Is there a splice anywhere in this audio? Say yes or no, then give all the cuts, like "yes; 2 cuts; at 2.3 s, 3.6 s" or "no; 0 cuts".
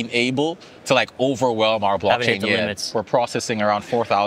yes; 1 cut; at 2.9 s